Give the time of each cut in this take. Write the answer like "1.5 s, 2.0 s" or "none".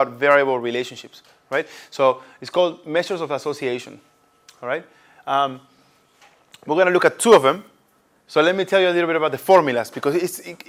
none